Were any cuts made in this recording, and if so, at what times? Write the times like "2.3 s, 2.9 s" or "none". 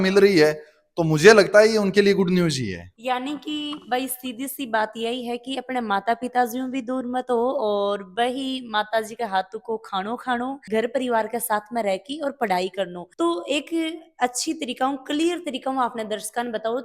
none